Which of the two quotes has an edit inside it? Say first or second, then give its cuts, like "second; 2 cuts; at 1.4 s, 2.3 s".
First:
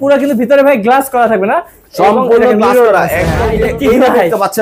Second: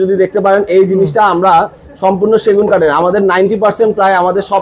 first; 1 cut; at 3.4 s